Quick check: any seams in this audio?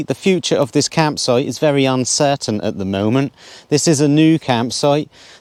no; 0 cuts

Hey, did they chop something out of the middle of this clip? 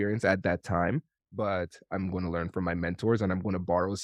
no; 0 cuts

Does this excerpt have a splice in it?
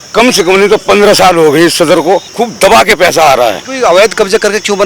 yes; 2 cuts; at 2.3 s, 3.7 s

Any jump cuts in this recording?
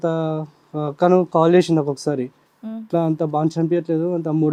no; 0 cuts

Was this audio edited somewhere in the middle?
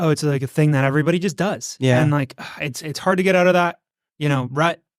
no; 0 cuts

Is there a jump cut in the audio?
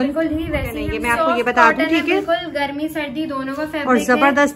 yes; 1 cut; at 0.9 s

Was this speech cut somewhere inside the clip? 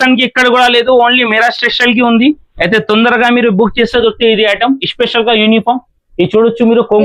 no; 0 cuts

